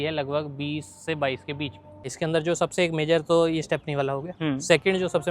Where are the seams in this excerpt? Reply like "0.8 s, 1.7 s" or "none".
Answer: 2.1 s

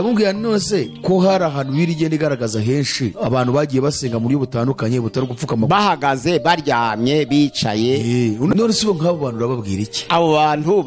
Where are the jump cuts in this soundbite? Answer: 0.9 s, 3.1 s, 8.5 s, 9.9 s

